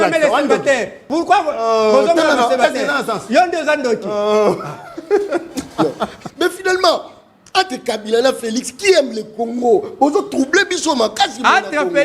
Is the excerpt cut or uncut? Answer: cut